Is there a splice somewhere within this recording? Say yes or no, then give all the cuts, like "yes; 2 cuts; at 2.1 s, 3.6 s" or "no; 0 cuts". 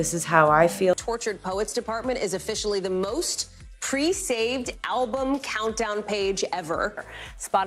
yes; 1 cut; at 1.0 s